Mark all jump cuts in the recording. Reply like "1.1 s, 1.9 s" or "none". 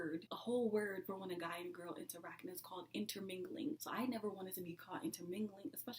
3.8 s